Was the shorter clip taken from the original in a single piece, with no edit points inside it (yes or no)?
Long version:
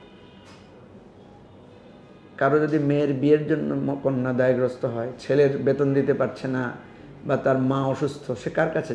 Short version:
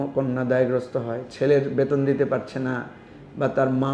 yes